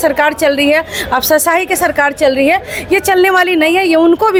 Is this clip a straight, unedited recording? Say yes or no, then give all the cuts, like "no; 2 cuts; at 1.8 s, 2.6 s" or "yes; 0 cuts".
yes; 0 cuts